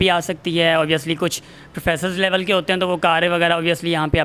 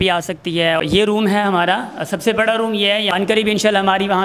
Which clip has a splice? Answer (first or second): second